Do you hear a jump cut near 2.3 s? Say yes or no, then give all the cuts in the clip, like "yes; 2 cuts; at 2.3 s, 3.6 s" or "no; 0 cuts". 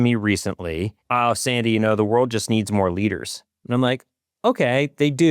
no; 1 cut; at 0.9 s